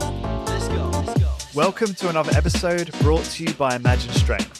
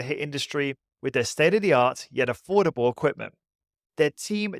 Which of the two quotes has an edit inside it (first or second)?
first